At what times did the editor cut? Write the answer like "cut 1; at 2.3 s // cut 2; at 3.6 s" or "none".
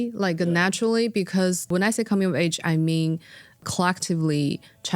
cut 1; at 1.7 s // cut 2; at 3.6 s